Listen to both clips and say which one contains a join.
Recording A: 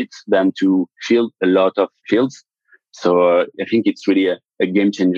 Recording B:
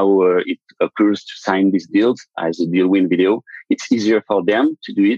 A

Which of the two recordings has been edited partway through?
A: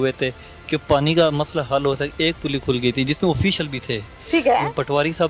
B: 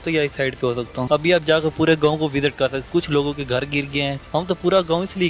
B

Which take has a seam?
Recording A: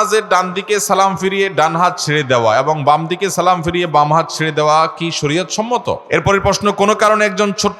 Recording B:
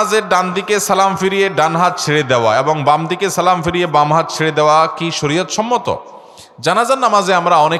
A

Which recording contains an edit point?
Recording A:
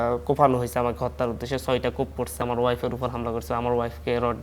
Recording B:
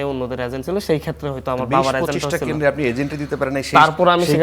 A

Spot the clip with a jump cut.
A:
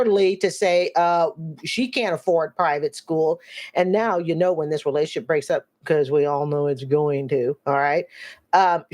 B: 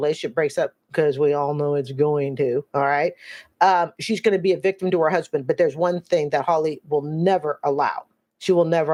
A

